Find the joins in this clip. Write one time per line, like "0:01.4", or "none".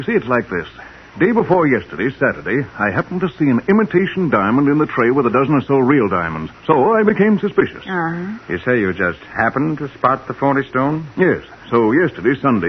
0:08.2